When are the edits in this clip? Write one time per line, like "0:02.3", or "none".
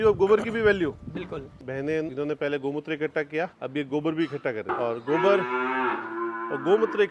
0:01.5
0:02.1
0:03.6
0:04.7